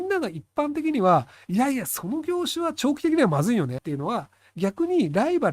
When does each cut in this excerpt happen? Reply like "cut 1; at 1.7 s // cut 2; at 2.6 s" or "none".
cut 1; at 3.8 s